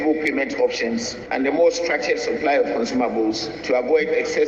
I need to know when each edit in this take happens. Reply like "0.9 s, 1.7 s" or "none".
1.2 s, 3.5 s